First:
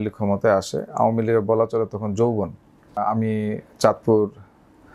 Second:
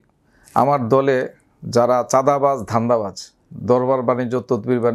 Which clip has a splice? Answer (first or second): first